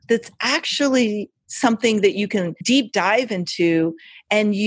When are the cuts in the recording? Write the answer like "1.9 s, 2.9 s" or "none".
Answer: 2.6 s